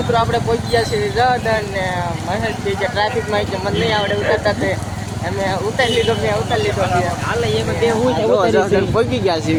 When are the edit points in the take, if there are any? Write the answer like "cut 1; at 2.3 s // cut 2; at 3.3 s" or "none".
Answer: none